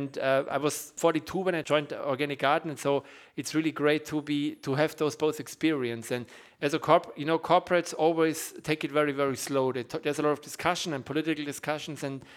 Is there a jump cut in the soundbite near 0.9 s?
yes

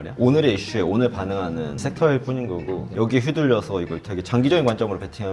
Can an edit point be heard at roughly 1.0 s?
no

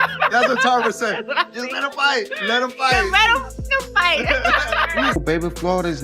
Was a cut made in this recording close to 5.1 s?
yes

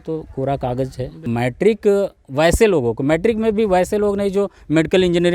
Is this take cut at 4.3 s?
no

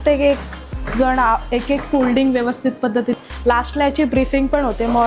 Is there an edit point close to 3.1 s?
yes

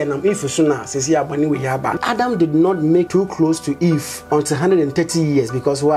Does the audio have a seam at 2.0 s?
yes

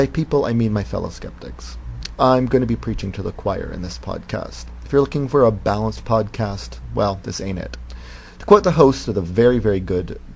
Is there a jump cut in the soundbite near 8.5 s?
no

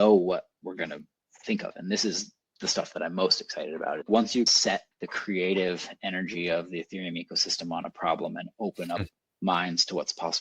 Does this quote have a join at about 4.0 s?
yes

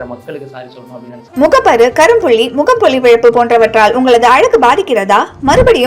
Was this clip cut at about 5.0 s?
no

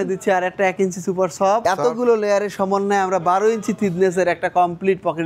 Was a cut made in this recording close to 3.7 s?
no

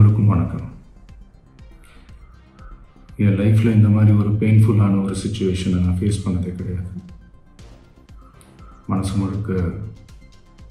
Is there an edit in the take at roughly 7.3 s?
yes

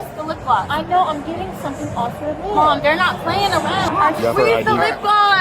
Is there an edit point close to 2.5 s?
no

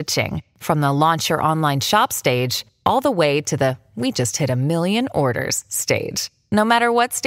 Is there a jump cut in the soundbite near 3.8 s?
no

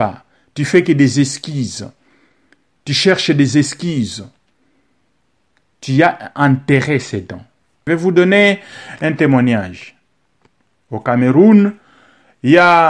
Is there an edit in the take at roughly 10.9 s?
no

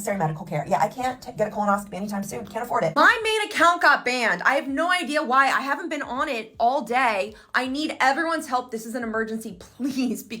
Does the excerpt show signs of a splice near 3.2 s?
yes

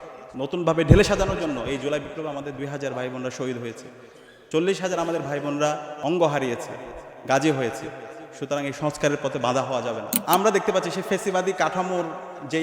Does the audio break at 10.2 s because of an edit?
yes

